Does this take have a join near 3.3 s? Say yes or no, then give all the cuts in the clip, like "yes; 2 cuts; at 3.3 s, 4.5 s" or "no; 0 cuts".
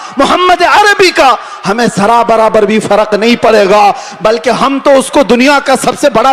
no; 0 cuts